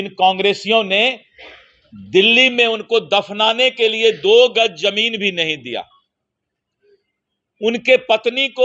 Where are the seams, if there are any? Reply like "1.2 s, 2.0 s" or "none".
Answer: none